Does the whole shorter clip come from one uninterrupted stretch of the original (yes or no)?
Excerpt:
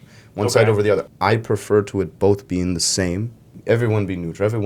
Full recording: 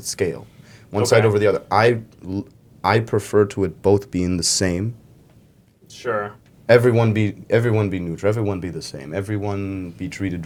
no